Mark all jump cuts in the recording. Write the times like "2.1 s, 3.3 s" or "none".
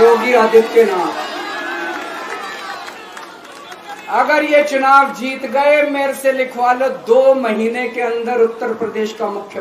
none